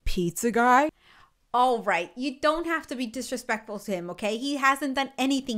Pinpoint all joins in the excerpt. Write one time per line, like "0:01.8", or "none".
none